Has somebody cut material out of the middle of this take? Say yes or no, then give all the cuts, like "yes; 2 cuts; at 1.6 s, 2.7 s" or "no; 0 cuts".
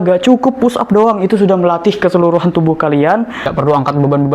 yes; 1 cut; at 3.4 s